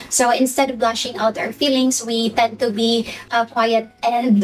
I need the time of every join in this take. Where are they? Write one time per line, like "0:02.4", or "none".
none